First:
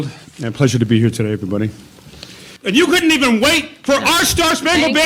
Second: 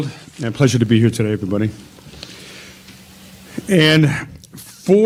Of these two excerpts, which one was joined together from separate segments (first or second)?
first